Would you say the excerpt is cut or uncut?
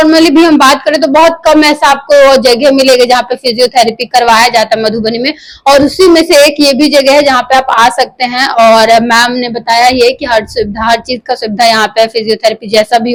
uncut